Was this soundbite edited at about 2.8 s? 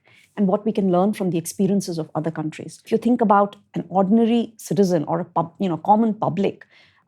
yes; 1 cut; at 2.8 s

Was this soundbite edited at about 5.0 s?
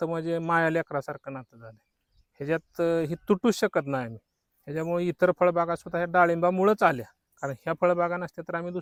no; 0 cuts

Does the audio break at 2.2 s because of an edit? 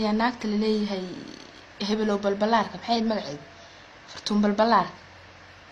no; 0 cuts

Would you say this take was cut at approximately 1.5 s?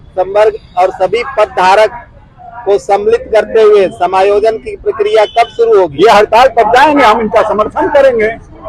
no; 1 cut; at 5.9 s

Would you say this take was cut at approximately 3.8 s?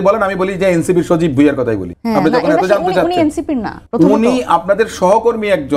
yes; 2 cuts; at 1.9 s, 3.8 s

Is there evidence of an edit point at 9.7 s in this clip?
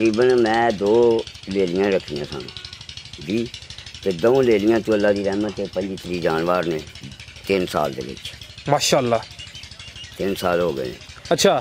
no; 0 cuts

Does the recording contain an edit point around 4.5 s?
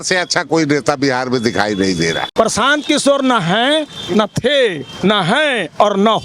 no; 1 cut; at 2.2 s

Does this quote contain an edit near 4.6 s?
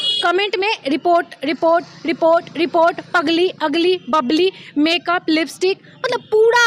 no; 0 cuts

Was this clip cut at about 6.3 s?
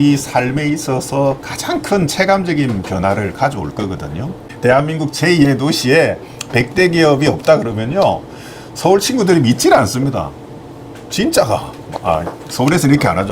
no; 1 cut; at 4.5 s

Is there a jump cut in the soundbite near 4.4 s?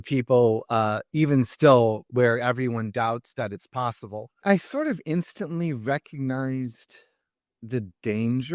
yes; 1 cut; at 4.4 s

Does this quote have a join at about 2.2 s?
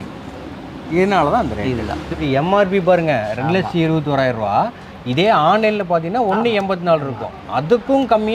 yes; 1 cut; at 2.2 s

